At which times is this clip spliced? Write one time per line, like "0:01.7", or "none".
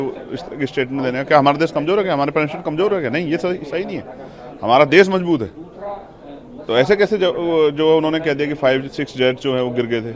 none